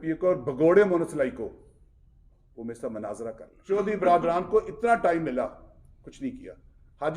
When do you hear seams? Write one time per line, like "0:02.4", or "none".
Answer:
0:03.5